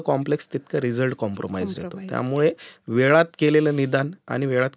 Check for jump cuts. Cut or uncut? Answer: uncut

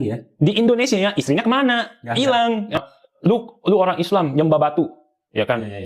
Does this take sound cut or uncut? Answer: cut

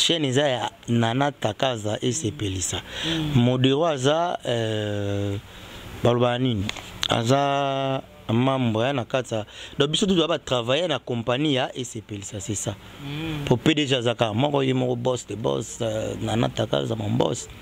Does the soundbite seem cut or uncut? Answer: uncut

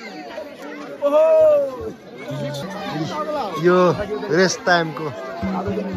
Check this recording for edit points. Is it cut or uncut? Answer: cut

